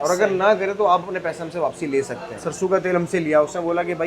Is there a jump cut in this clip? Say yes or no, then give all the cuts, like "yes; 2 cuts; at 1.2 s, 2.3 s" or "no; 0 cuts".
yes; 1 cut; at 2.4 s